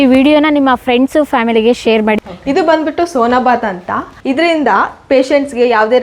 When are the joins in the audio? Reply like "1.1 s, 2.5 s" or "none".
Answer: 2.2 s, 4.1 s